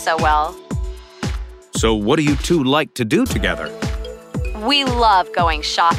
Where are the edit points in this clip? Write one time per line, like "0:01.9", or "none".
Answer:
none